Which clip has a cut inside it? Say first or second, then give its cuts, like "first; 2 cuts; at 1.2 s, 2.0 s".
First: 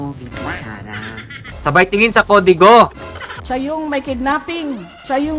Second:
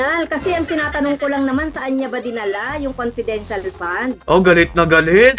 first; 2 cuts; at 1.4 s, 3.4 s